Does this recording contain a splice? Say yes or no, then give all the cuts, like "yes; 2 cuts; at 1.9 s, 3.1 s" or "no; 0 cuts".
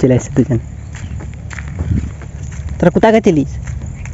yes; 1 cut; at 2.0 s